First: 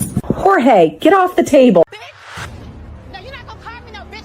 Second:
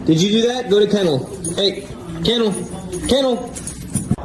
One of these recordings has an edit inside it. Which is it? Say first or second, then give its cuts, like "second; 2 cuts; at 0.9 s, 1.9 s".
first; 1 cut; at 1.9 s